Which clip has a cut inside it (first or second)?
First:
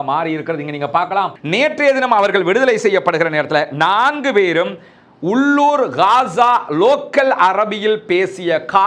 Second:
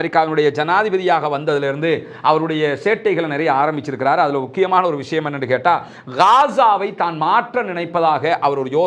first